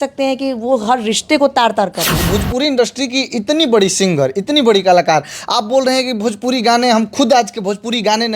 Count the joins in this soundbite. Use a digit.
1